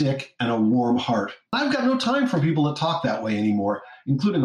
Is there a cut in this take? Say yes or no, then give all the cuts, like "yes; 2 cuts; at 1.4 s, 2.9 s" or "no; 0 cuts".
yes; 1 cut; at 1.4 s